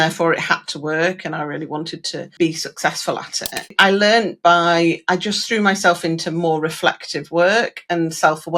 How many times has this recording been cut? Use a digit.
2